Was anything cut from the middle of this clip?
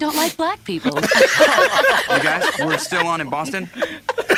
no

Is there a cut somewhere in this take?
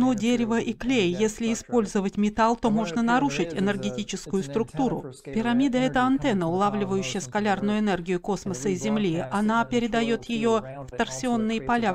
yes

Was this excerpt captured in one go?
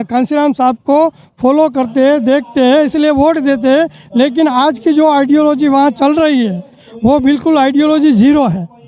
yes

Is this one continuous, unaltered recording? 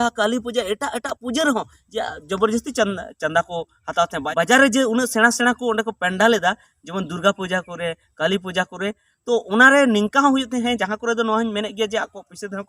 no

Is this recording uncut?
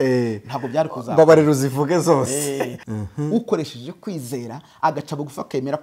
no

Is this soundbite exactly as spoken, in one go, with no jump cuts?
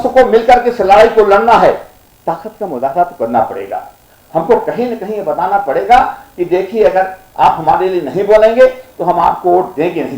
no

